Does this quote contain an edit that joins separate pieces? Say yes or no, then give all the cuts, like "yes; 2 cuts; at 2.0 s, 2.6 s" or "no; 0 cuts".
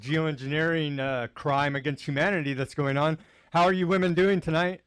yes; 1 cut; at 3.4 s